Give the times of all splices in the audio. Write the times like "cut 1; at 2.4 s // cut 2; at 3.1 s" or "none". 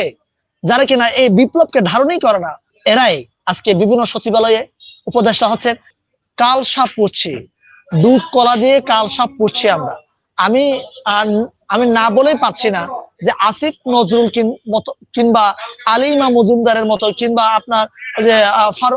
cut 1; at 2.6 s // cut 2; at 5.9 s